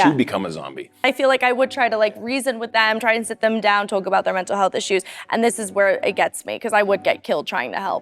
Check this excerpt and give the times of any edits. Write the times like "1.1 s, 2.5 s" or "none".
0.9 s